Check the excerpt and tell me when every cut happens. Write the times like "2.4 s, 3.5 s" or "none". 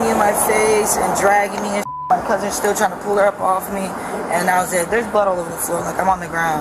none

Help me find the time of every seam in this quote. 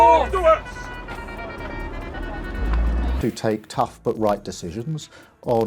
3.1 s

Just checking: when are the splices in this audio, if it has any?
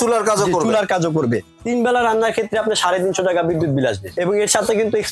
1.5 s, 4.1 s

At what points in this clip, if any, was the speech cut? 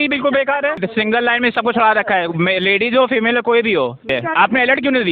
0.8 s, 4.1 s

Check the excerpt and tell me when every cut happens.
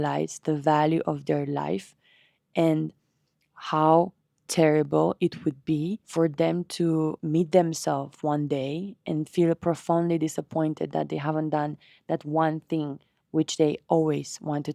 6.0 s, 7.2 s

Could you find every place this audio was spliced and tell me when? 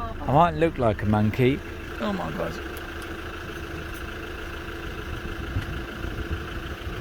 none

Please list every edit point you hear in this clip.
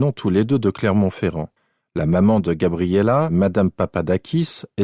3.3 s

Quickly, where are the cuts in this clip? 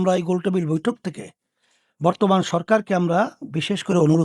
none

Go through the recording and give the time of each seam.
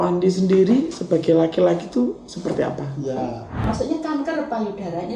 3.6 s

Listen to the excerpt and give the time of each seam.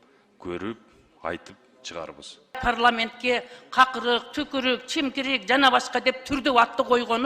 2.6 s

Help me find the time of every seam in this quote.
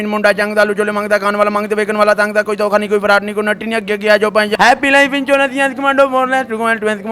4.5 s

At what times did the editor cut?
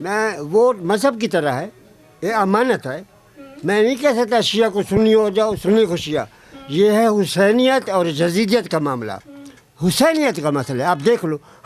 none

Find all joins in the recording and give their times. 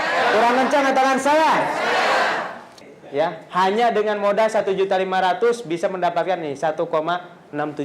2.8 s

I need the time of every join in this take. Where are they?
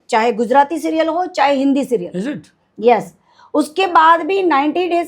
none

